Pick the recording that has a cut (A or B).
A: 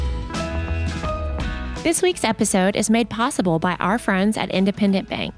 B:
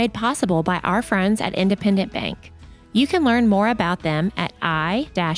A